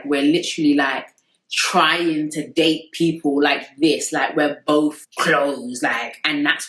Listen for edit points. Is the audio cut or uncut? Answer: uncut